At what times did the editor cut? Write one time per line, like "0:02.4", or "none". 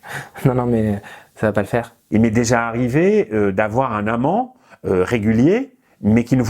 0:02.0